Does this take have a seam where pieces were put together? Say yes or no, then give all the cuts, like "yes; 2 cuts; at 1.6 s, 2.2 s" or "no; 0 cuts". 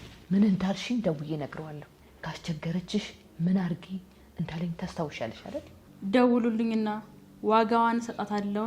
no; 0 cuts